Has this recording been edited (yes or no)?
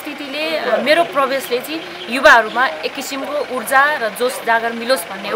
no